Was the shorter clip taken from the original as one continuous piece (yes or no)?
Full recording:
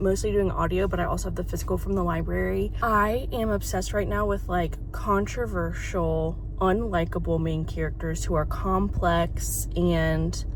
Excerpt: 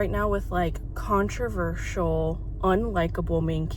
yes